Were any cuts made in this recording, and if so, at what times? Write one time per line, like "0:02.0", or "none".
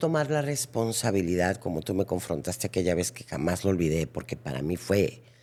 none